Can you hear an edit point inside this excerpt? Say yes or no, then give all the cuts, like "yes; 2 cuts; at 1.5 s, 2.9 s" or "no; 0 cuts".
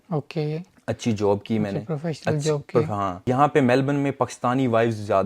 yes; 1 cut; at 3.2 s